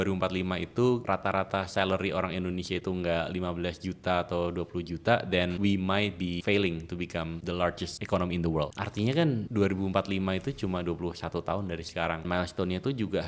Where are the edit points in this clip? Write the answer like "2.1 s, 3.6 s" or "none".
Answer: 1.0 s, 5.6 s, 6.4 s, 7.6 s, 8.8 s, 9.5 s, 12.2 s